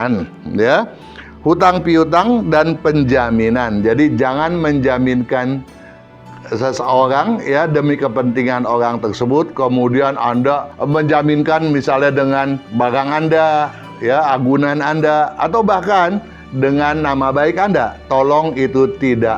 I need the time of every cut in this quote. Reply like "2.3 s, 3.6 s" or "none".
none